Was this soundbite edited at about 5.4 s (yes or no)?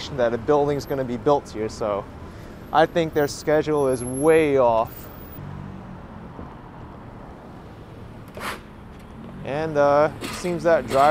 yes